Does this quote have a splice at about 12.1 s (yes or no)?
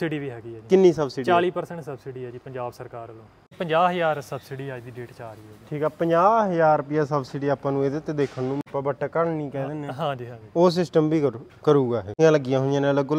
yes